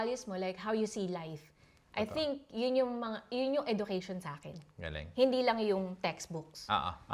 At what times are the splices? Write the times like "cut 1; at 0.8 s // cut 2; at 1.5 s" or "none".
none